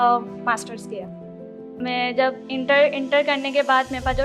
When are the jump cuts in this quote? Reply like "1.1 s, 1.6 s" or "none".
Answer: 1.4 s